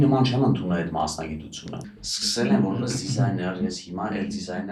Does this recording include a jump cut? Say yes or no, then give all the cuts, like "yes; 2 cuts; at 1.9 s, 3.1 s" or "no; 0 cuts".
no; 0 cuts